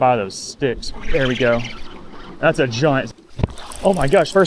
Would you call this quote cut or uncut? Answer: cut